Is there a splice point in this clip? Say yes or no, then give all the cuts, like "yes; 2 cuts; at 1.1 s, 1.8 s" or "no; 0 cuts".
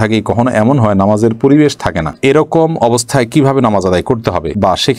no; 0 cuts